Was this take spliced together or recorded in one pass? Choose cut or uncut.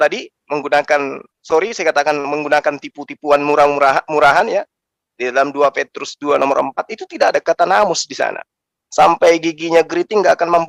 uncut